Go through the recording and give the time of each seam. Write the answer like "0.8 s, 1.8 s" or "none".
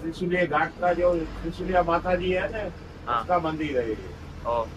none